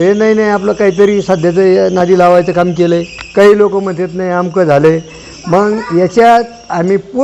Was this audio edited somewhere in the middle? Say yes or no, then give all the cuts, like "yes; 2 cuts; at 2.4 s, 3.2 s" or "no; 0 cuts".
no; 0 cuts